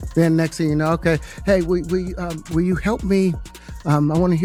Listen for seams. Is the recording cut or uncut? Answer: uncut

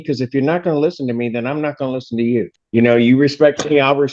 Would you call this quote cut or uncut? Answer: cut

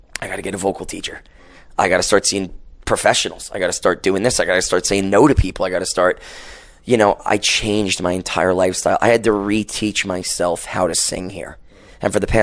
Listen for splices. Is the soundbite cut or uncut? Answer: uncut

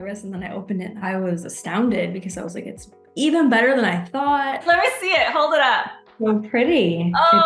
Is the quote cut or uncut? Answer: cut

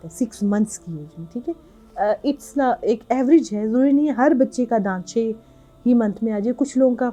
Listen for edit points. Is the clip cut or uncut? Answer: uncut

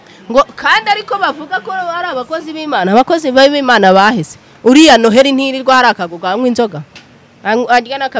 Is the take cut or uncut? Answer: uncut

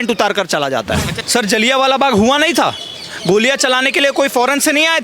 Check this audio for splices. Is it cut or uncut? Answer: cut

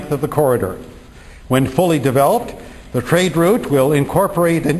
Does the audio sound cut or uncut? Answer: cut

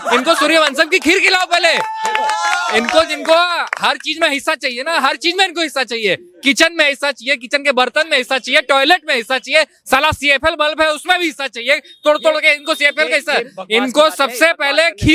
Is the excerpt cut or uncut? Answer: uncut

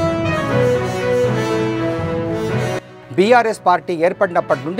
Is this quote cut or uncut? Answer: uncut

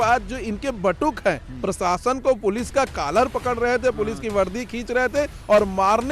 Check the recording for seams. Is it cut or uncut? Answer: uncut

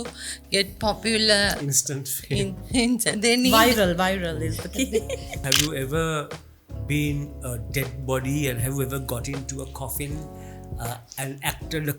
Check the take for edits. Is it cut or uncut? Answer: cut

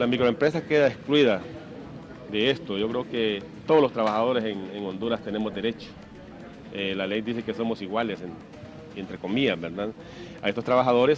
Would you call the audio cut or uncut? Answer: uncut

